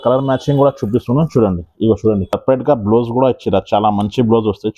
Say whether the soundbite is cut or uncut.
cut